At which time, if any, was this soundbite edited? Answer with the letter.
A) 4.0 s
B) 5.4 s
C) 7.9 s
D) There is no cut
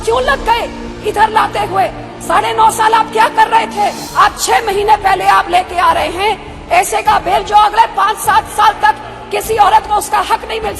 A